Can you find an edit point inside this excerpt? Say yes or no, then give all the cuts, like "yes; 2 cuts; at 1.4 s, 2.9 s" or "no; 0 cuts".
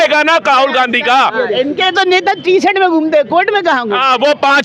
no; 0 cuts